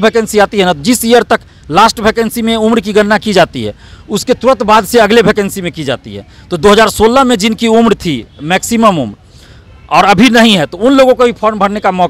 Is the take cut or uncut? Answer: uncut